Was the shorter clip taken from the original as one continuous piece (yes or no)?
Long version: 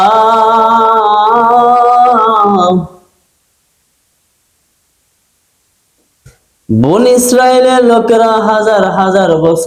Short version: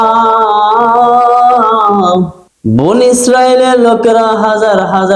no